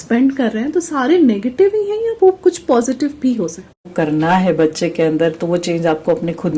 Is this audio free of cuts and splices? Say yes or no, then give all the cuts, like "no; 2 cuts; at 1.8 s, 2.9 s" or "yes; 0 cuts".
no; 1 cut; at 3.8 s